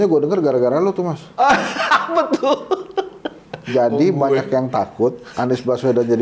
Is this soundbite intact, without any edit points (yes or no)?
yes